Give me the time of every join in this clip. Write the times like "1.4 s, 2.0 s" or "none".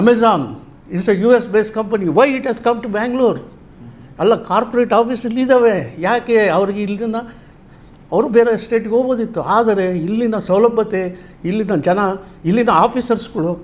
none